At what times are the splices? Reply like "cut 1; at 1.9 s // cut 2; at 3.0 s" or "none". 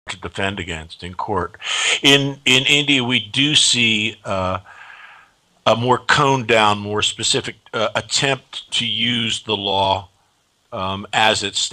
cut 1; at 6.1 s